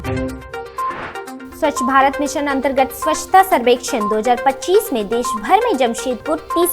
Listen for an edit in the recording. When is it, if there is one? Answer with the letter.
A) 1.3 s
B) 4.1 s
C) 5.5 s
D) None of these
A